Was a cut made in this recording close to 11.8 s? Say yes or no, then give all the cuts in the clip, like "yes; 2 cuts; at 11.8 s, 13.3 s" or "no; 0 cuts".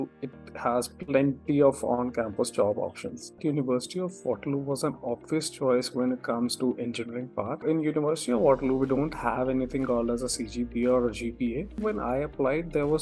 yes; 3 cuts; at 3.4 s, 7.6 s, 11.8 s